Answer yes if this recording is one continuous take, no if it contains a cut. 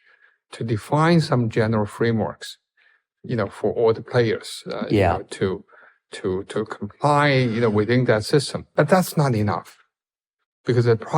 no